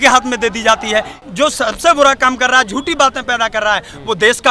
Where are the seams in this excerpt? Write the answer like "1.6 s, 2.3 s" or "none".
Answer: 1.2 s